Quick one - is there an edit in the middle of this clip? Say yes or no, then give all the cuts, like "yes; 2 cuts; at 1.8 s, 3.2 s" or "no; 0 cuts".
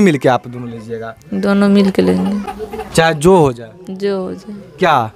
no; 0 cuts